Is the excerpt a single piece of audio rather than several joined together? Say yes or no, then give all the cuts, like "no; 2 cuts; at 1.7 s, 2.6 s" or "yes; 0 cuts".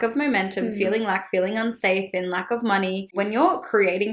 no; 1 cut; at 3.1 s